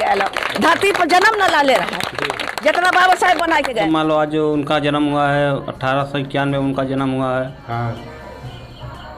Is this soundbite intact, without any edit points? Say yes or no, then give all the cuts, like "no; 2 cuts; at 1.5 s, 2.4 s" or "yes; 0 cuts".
no; 1 cut; at 3.8 s